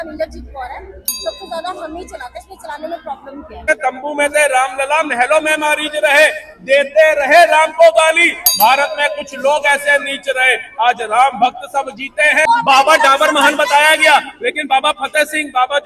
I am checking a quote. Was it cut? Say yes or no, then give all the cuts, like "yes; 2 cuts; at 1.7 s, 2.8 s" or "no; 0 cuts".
yes; 2 cuts; at 3.7 s, 12.5 s